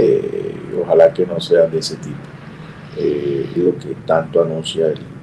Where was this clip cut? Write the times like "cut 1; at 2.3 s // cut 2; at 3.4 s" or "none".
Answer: cut 1; at 3.6 s